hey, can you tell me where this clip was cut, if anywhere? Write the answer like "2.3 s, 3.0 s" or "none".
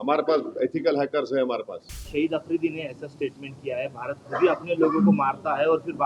2.0 s